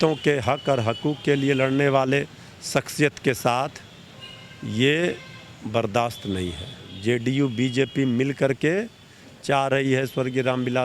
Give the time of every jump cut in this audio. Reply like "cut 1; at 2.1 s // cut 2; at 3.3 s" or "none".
cut 1; at 6.9 s